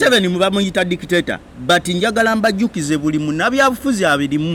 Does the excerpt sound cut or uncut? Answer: uncut